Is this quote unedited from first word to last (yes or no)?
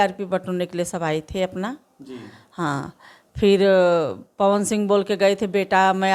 yes